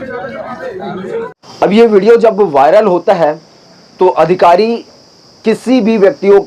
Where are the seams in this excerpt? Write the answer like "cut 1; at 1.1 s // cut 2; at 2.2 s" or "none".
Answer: cut 1; at 1.4 s